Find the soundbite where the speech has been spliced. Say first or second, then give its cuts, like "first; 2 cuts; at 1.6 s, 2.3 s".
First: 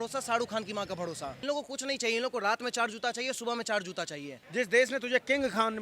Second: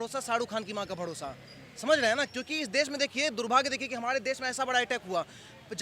first; 2 cuts; at 1.4 s, 4.4 s